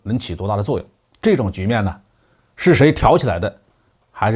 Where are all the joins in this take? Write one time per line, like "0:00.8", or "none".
none